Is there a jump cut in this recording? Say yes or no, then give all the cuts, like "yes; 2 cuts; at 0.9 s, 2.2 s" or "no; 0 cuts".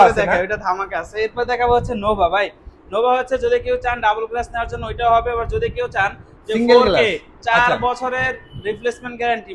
no; 0 cuts